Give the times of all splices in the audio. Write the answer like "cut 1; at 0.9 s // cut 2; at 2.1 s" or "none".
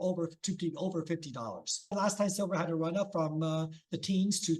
cut 1; at 1.9 s